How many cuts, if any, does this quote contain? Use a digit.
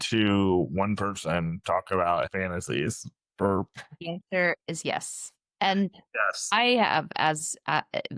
1